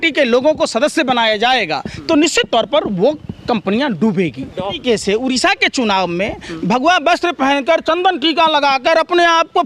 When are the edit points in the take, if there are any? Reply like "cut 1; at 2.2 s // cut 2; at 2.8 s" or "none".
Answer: cut 1; at 4.8 s